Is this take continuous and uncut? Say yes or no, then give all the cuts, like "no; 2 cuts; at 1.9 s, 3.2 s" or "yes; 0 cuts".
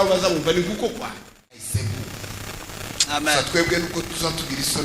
no; 1 cut; at 1.8 s